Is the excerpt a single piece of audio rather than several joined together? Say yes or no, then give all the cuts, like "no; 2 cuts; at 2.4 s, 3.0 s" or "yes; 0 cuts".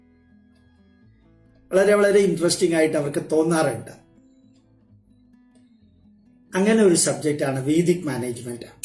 no; 2 cuts; at 4.5 s, 6.5 s